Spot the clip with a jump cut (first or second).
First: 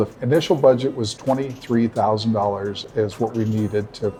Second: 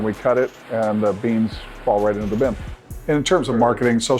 second